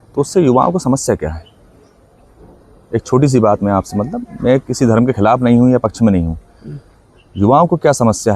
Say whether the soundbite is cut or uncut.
uncut